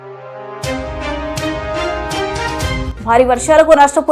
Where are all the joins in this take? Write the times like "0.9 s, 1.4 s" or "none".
2.9 s